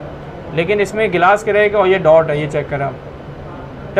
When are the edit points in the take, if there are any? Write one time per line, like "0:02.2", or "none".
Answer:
none